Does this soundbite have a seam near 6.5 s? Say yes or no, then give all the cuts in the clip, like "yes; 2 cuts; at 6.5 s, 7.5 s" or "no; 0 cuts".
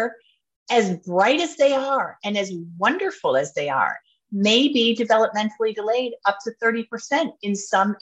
no; 1 cut; at 4.0 s